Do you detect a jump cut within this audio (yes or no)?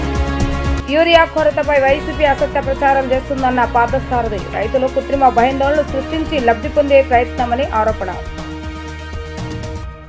no